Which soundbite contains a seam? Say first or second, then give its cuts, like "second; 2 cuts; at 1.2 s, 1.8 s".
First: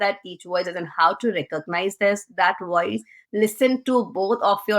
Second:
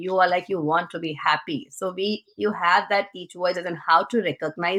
first; 1 cut; at 3.2 s